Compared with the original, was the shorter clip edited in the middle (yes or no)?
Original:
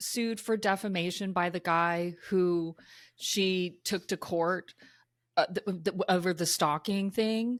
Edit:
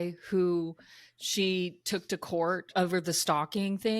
yes